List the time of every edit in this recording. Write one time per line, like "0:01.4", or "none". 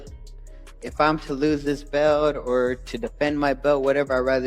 0:02.4